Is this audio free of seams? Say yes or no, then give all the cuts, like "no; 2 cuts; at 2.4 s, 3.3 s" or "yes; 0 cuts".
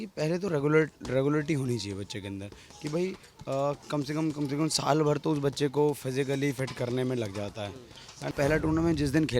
no; 1 cut; at 8.2 s